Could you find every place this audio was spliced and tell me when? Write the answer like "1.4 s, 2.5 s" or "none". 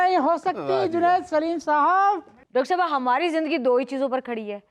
2.3 s